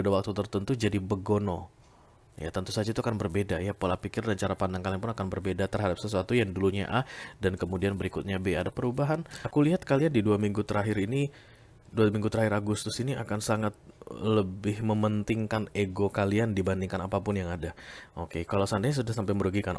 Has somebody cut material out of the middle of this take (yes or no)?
yes